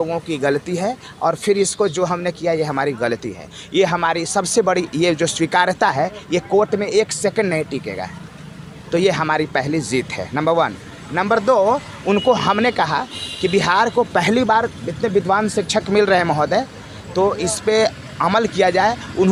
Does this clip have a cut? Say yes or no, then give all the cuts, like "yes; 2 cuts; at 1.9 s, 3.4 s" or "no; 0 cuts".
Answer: no; 0 cuts